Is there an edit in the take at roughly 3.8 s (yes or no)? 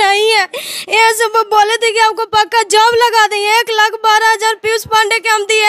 no